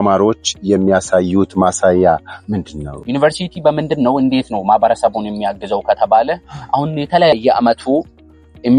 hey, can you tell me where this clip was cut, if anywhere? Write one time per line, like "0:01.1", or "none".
0:03.0
0:07.3